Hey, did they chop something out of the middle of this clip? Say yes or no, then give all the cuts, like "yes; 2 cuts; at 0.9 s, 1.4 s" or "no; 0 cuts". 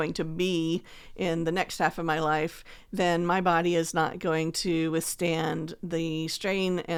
no; 0 cuts